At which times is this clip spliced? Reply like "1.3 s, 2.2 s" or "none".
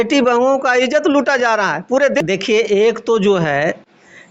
2.2 s